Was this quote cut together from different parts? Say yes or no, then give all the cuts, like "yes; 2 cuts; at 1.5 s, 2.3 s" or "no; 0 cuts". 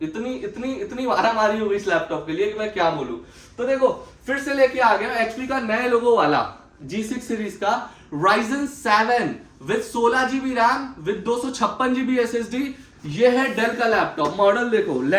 yes; 1 cut; at 12.9 s